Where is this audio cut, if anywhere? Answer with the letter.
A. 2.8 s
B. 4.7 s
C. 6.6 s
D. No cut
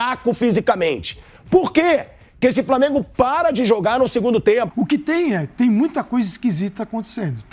B